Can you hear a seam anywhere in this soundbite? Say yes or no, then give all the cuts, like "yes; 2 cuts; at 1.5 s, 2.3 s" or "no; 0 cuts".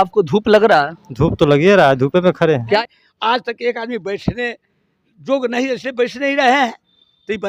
yes; 1 cut; at 2.8 s